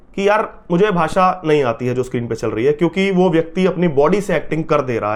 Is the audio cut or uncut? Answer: uncut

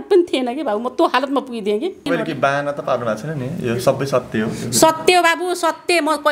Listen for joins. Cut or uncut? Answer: cut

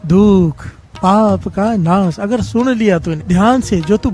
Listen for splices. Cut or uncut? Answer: cut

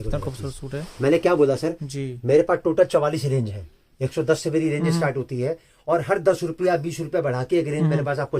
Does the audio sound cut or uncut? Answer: uncut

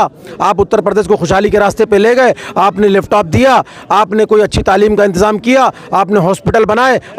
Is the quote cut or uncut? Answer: uncut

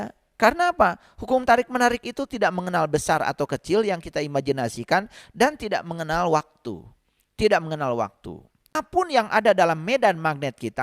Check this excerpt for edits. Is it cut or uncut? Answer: cut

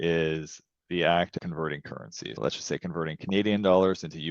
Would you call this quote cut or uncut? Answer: cut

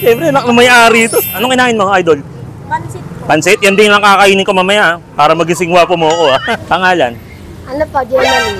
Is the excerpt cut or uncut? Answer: cut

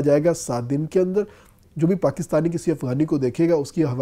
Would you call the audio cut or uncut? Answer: cut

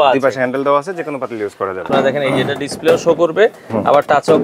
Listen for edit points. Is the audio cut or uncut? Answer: cut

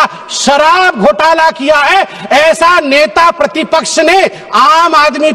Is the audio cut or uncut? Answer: uncut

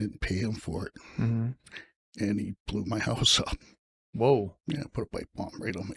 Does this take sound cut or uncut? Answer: uncut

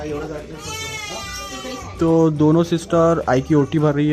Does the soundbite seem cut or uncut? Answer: uncut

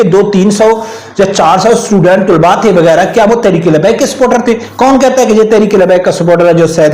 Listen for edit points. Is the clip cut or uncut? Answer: cut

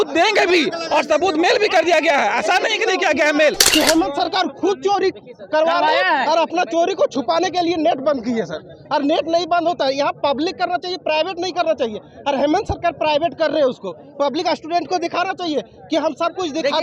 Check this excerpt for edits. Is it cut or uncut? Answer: cut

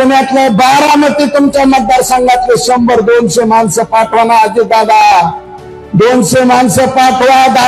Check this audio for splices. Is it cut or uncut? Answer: uncut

